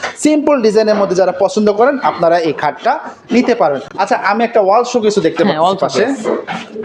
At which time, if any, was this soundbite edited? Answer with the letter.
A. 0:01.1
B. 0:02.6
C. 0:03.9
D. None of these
D